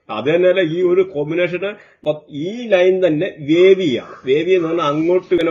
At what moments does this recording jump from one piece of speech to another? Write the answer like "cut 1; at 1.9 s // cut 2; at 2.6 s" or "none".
none